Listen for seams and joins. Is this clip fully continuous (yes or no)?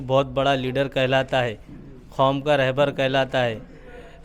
yes